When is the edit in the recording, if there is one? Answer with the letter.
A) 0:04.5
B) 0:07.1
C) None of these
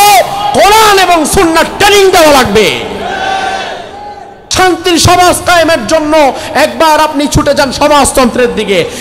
A